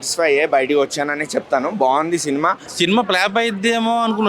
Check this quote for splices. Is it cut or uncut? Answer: cut